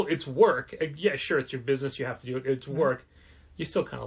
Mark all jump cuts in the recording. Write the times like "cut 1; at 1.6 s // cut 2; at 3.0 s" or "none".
none